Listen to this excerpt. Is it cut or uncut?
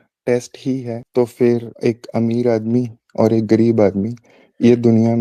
cut